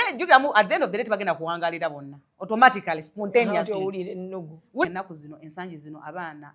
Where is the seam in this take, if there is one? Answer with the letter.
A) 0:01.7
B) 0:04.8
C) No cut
B